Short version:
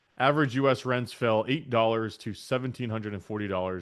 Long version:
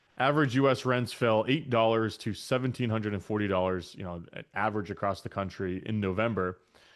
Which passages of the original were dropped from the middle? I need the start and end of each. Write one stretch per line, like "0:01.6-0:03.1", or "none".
none